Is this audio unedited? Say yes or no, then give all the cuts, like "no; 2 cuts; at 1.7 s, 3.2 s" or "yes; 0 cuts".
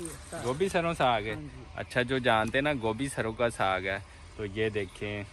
yes; 0 cuts